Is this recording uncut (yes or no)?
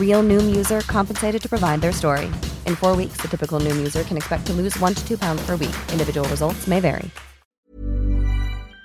no